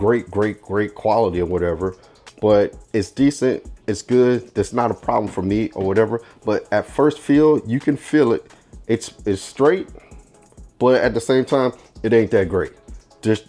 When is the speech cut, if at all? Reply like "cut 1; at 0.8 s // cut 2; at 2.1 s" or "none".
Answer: none